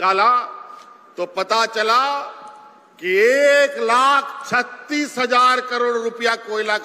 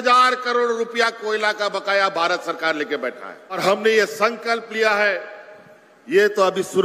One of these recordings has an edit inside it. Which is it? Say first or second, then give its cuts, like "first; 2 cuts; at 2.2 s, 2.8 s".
second; 1 cut; at 3.6 s